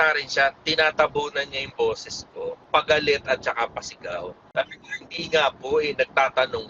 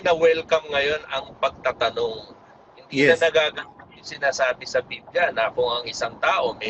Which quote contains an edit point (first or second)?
first